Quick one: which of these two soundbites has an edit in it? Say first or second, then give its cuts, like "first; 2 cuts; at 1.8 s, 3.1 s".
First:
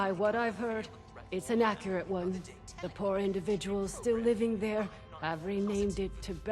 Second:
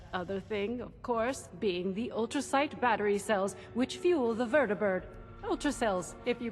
first; 1 cut; at 2.5 s